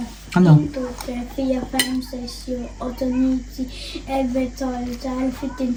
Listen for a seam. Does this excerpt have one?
no; 0 cuts

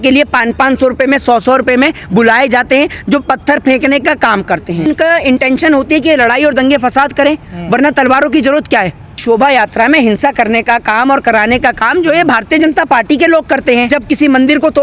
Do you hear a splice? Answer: yes; 3 cuts; at 4.9 s, 9.2 s, 13.9 s

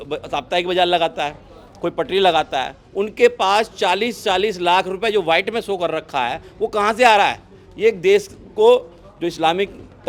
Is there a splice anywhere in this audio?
no; 0 cuts

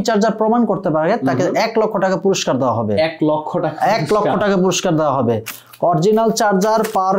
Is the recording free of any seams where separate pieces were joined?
yes; 0 cuts

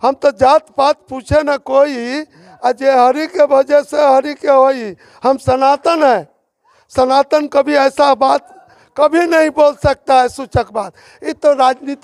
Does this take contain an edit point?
no; 0 cuts

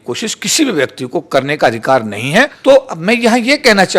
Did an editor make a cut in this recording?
yes; 1 cut; at 2.6 s

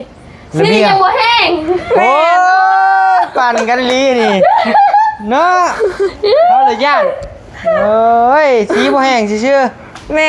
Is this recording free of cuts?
yes; 0 cuts

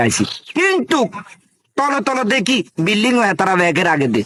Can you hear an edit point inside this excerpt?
no; 0 cuts

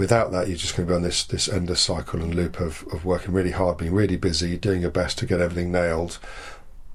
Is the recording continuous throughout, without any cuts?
yes; 0 cuts

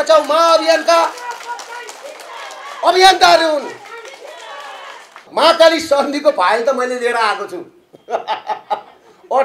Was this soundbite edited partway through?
yes; 1 cut; at 5.3 s

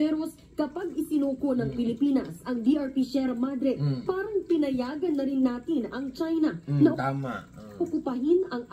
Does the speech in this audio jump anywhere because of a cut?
no; 0 cuts

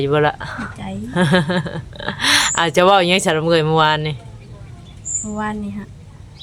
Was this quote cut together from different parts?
no; 0 cuts

